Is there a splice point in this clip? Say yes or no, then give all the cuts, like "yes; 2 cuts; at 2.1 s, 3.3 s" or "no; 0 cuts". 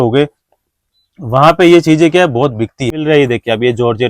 yes; 1 cut; at 3.0 s